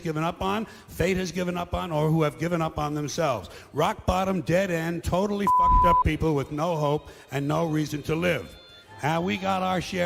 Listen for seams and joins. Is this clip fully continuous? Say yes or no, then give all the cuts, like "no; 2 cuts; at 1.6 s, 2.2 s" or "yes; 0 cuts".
yes; 0 cuts